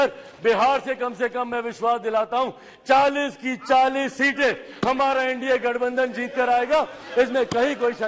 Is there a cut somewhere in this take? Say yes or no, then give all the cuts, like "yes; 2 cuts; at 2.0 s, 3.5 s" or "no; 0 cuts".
no; 0 cuts